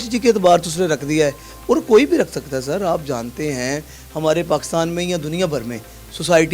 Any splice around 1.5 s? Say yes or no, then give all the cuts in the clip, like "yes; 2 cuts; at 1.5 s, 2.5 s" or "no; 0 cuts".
no; 0 cuts